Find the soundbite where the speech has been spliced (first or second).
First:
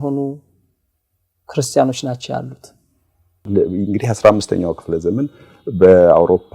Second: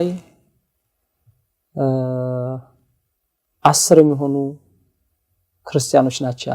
first